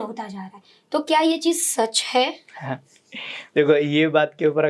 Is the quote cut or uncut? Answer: uncut